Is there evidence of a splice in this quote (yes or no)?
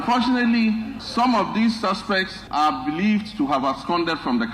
yes